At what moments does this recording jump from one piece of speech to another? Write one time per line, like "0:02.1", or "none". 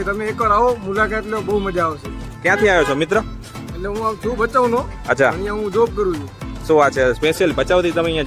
none